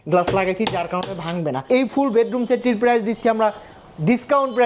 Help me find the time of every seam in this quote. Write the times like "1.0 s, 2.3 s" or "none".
1.6 s